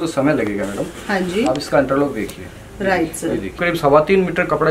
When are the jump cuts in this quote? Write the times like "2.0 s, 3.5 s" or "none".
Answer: 3.6 s